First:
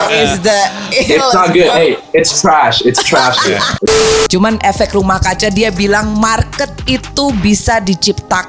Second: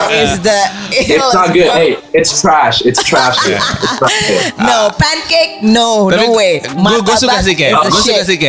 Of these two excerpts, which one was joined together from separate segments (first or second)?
first